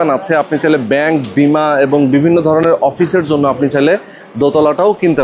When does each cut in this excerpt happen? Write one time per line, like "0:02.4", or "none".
none